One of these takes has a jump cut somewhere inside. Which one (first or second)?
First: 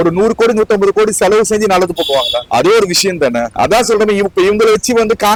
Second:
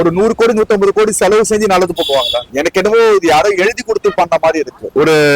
second